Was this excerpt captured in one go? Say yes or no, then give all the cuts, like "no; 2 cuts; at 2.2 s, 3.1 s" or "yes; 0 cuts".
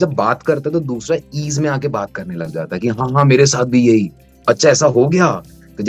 yes; 0 cuts